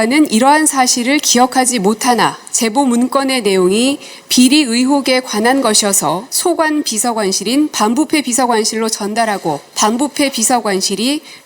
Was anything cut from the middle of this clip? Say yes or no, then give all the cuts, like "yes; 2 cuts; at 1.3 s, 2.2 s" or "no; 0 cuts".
yes; 3 cuts; at 2.4 s, 6.3 s, 9.7 s